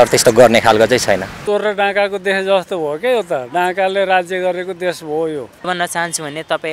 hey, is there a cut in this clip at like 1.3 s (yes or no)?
yes